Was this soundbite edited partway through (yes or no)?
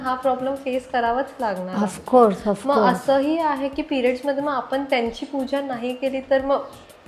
no